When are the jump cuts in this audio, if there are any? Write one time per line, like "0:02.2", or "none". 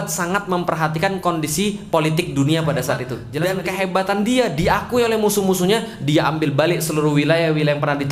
0:03.2